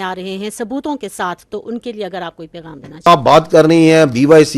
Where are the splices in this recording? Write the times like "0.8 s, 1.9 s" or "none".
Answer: 3.1 s